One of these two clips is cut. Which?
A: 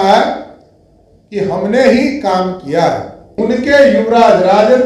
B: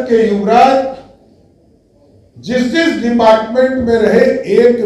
A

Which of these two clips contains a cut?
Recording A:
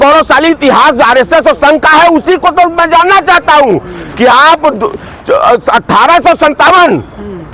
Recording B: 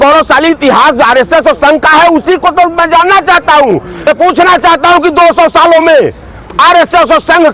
B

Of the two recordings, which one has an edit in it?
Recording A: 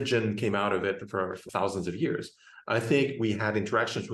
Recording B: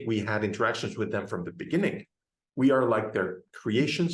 A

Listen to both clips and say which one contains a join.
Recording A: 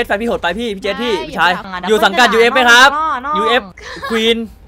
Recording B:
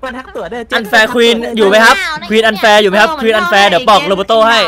A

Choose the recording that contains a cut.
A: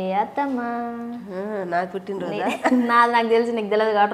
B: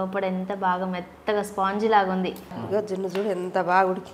B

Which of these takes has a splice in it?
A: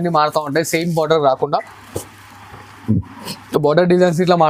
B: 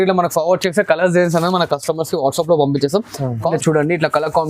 B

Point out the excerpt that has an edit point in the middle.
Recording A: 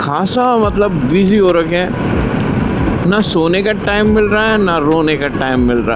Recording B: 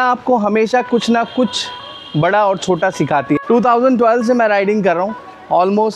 B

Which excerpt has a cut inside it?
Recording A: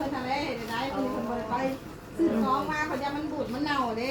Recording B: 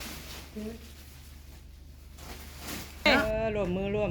B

